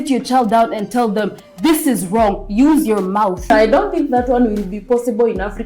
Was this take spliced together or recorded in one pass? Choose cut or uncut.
cut